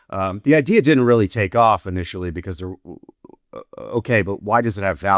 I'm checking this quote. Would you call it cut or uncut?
uncut